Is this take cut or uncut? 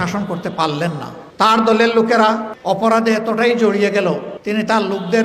cut